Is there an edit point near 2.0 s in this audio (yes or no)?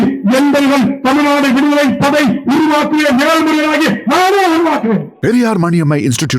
no